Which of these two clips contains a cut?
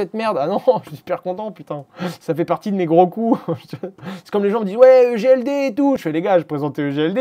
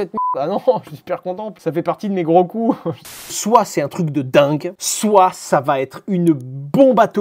second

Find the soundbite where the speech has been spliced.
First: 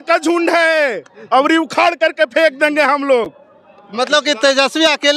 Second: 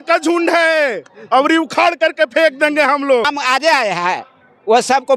second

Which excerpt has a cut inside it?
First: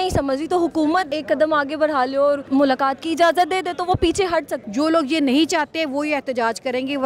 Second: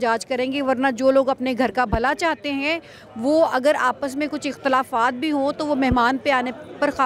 first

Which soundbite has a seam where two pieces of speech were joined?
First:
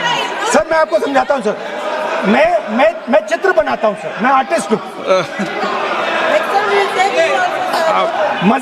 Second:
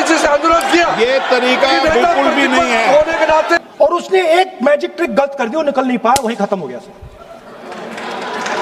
second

